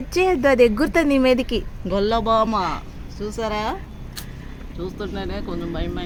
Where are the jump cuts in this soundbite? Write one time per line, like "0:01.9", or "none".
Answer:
none

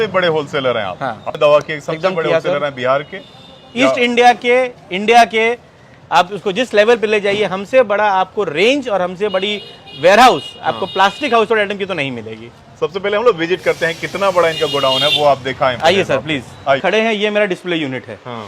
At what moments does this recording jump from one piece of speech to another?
0:01.3
0:16.8

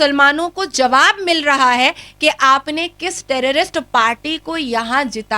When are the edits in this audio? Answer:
none

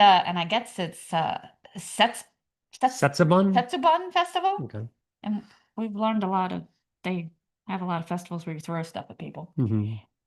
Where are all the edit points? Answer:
none

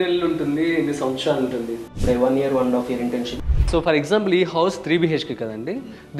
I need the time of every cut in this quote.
0:02.0
0:03.3

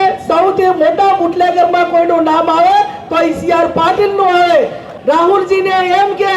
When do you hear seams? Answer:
0:04.8

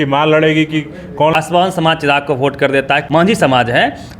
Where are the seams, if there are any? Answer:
0:01.3
0:03.0

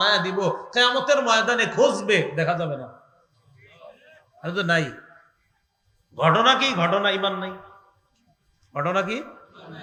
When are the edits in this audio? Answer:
none

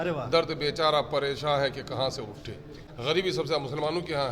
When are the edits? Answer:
0:02.8

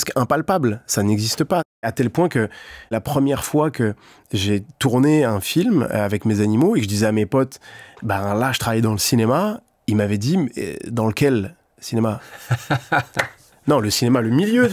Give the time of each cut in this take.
0:01.8
0:02.9

